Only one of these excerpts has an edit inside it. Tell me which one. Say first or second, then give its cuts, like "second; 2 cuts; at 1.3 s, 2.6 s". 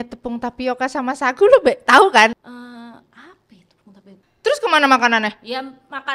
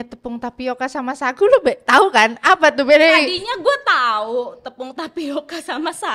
first; 2 cuts; at 2.4 s, 4.3 s